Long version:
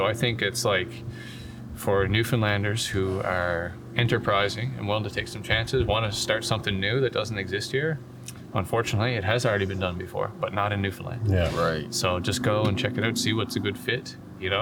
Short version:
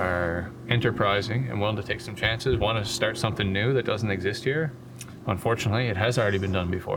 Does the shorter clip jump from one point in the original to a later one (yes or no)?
no